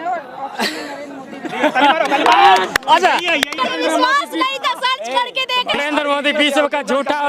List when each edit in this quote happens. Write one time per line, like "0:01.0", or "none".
0:03.5
0:05.8